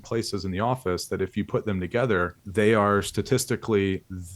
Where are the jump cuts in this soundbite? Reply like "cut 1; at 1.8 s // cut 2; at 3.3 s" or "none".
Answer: cut 1; at 2.4 s